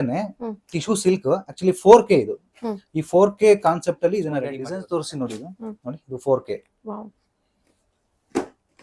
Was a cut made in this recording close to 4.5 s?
yes; 1 cut; at 4.5 s

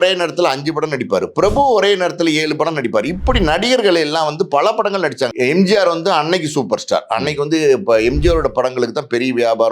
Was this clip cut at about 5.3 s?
yes; 1 cut; at 5.3 s

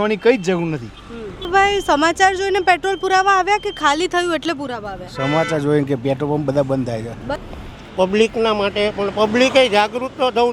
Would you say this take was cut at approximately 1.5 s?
yes; 2 cuts; at 1.5 s, 7.3 s

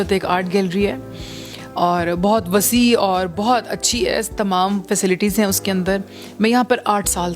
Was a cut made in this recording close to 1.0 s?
no; 0 cuts

